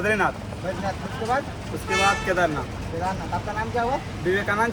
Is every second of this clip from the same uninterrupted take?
yes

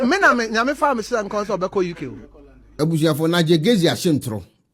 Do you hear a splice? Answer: no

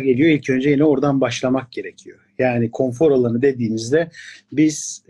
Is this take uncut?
yes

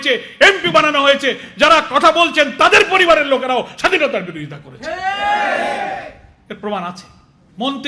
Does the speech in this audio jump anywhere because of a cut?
no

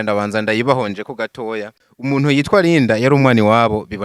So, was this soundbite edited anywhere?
yes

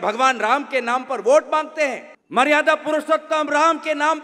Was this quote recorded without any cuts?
yes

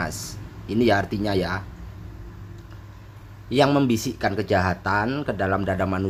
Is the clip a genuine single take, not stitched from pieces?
yes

